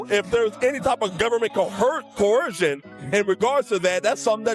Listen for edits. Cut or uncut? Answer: uncut